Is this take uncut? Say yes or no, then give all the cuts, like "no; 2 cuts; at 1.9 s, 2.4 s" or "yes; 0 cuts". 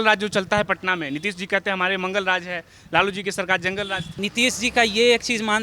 no; 1 cut; at 4.1 s